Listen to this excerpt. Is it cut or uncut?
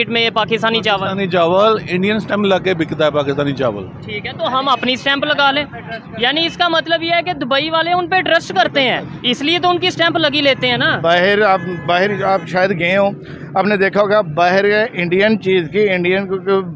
uncut